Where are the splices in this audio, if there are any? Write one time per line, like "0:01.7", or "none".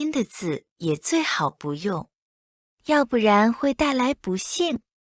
none